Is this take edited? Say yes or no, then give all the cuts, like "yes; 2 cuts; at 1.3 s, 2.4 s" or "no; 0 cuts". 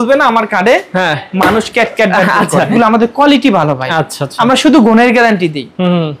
yes; 1 cut; at 2.7 s